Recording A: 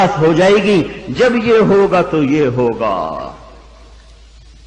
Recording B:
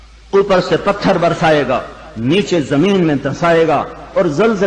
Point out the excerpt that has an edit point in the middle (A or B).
B